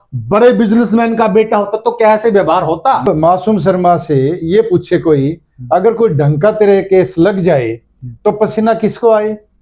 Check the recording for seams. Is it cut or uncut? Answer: cut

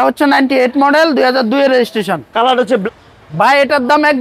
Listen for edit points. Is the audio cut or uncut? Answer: cut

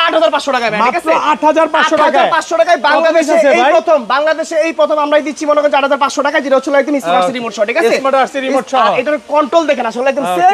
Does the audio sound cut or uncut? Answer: uncut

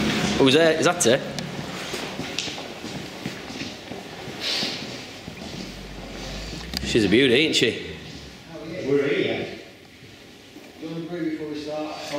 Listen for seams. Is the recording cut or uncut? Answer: cut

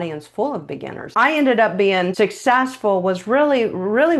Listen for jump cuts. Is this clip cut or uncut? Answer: cut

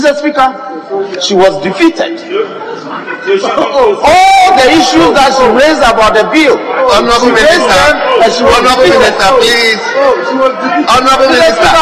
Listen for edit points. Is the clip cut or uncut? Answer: uncut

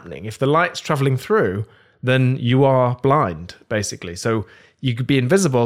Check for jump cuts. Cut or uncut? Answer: uncut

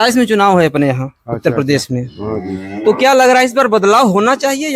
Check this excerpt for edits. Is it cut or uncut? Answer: uncut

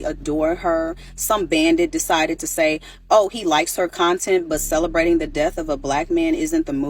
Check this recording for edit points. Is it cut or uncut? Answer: cut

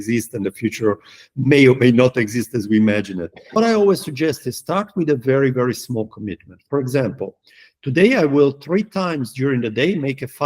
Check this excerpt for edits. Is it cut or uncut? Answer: cut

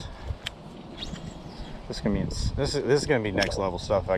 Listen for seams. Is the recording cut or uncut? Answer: uncut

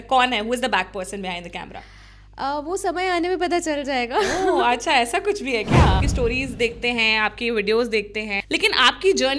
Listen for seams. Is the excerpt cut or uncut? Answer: cut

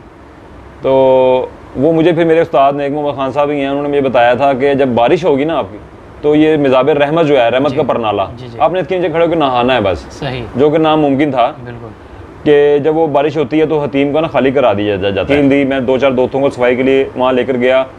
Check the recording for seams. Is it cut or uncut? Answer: cut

